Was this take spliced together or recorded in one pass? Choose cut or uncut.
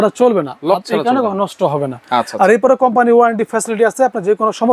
uncut